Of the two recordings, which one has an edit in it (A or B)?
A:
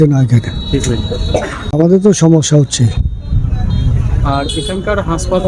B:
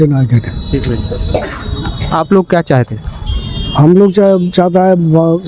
A